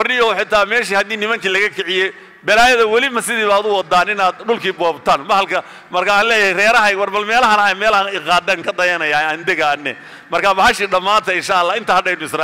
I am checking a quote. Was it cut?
no; 0 cuts

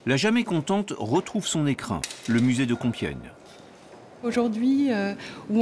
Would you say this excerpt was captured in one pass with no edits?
yes; 0 cuts

